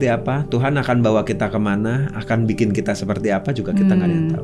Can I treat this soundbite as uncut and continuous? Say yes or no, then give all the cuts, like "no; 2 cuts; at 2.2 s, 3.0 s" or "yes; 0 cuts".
yes; 0 cuts